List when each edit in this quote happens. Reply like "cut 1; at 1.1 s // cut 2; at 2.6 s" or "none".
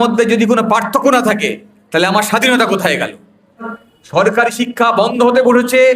cut 1; at 3.7 s